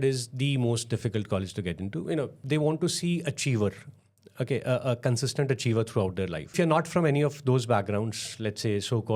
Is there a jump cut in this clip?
yes; 2 cuts; at 2.4 s, 6.5 s

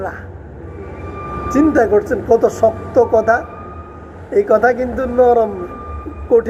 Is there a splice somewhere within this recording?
no; 0 cuts

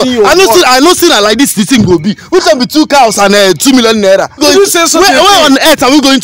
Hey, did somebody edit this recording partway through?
yes; 1 cut; at 4.4 s

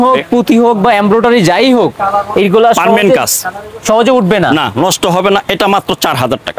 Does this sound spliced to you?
no; 0 cuts

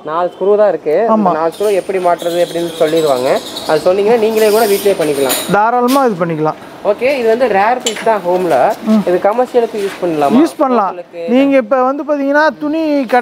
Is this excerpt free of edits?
yes; 0 cuts

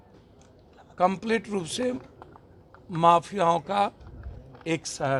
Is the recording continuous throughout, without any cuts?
yes; 0 cuts

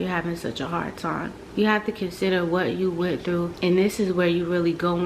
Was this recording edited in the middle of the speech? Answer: yes; 1 cut; at 1.4 s

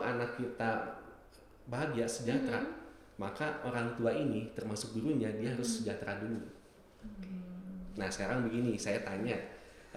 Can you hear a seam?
no; 0 cuts

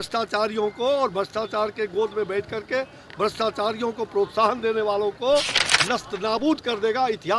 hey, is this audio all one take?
yes; 0 cuts

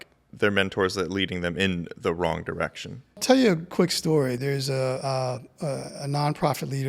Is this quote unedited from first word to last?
no; 2 cuts; at 3.2 s, 4.4 s

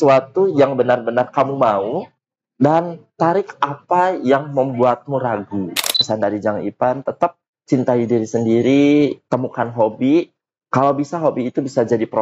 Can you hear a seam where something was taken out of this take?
yes; 1 cut; at 6.0 s

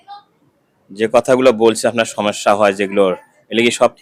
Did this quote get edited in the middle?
no; 0 cuts

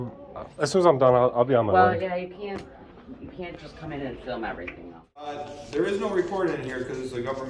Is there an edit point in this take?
yes; 1 cut; at 5.4 s

